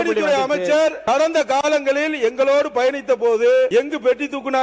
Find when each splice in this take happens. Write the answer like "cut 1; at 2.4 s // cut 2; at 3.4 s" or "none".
cut 1; at 1.0 s // cut 2; at 3.7 s